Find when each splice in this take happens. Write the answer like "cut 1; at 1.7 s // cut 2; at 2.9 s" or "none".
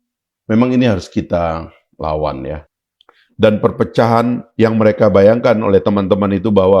cut 1; at 2.6 s

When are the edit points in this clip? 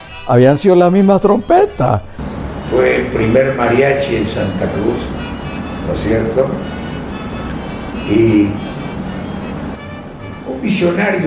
cut 1; at 2.2 s // cut 2; at 9.8 s

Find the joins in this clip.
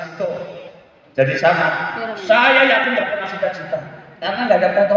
cut 1; at 3.1 s

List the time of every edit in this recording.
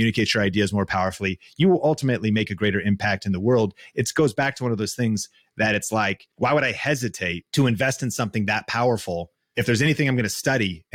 cut 1; at 6.2 s // cut 2; at 7.4 s // cut 3; at 9.4 s

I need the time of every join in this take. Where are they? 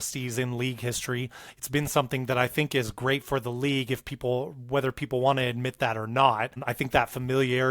cut 1; at 6.7 s

